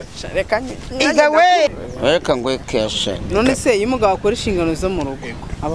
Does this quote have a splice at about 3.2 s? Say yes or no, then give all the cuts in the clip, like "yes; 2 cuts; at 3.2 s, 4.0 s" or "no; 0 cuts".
yes; 2 cuts; at 1.7 s, 3.2 s